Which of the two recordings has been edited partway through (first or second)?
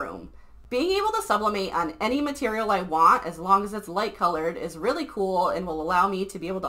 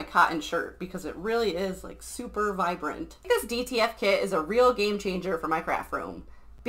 second